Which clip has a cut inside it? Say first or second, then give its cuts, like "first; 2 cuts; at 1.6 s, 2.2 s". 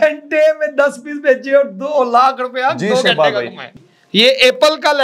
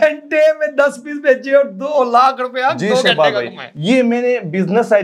first; 1 cut; at 3.7 s